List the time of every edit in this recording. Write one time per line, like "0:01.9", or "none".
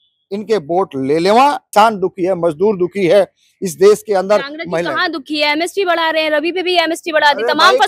0:01.6